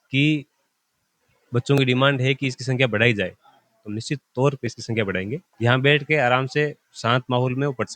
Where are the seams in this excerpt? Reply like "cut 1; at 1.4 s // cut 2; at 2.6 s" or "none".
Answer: cut 1; at 5.4 s